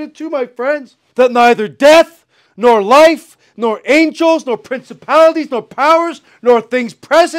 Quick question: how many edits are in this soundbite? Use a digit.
1